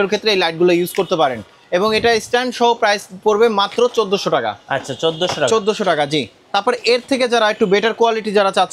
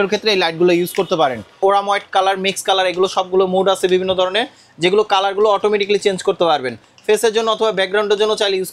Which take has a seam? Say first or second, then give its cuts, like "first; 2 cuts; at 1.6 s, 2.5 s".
second; 1 cut; at 1.6 s